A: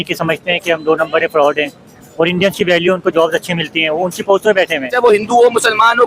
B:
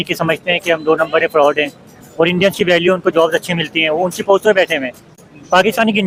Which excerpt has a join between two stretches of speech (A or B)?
A